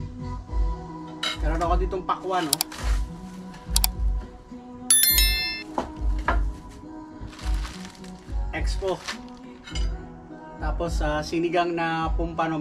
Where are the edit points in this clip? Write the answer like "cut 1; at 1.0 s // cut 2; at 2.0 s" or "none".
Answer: none